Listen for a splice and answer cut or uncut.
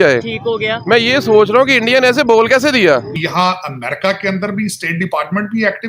cut